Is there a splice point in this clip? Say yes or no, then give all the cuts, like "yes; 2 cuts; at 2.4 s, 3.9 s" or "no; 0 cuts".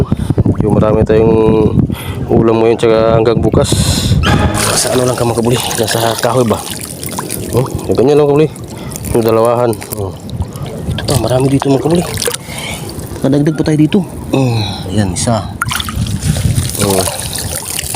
yes; 2 cuts; at 4.5 s, 10.6 s